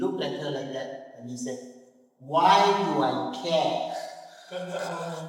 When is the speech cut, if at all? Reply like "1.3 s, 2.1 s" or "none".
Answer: none